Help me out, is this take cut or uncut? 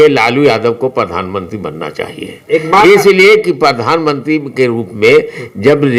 uncut